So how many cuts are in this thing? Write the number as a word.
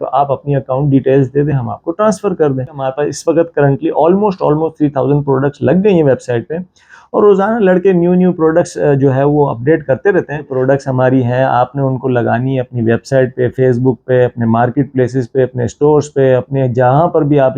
two